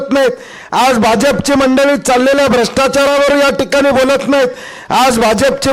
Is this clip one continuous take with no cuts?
yes; 0 cuts

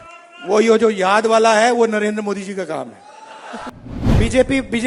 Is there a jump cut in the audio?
yes; 1 cut; at 3.7 s

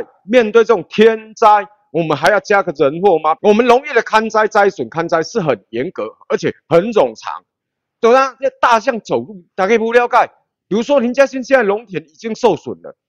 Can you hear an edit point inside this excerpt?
yes; 1 cut; at 3.4 s

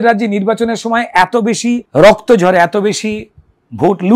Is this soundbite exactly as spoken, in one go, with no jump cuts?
no; 1 cut; at 1.9 s

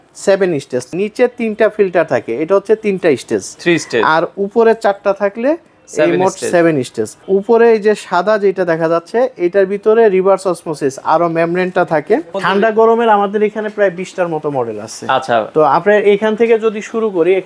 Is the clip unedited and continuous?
no; 3 cuts; at 0.9 s, 7.2 s, 12.3 s

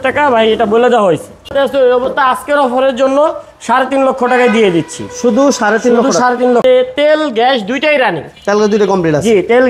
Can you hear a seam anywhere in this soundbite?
yes; 2 cuts; at 1.5 s, 6.6 s

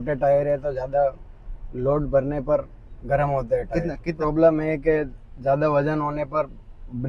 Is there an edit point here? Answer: yes; 1 cut; at 4.1 s

